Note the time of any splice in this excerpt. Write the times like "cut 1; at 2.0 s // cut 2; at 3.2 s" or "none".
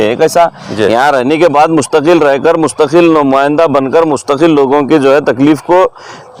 none